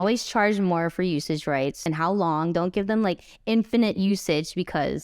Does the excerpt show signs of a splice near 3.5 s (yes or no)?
no